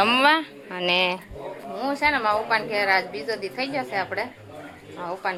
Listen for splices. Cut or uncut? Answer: uncut